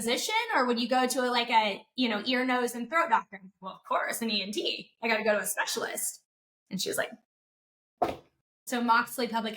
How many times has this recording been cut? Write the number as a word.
two